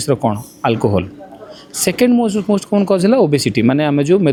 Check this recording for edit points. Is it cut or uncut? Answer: uncut